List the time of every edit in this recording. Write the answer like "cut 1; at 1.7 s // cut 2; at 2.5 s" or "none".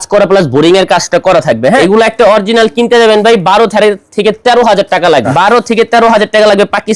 cut 1; at 1.8 s // cut 2; at 5.3 s